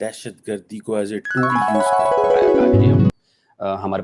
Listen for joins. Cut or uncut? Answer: cut